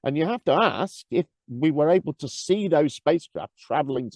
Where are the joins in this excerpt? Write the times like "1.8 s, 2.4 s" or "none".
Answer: 1.4 s